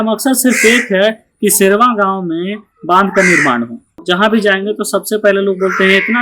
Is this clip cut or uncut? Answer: cut